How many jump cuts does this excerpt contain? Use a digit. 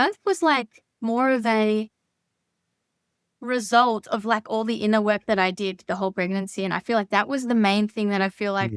0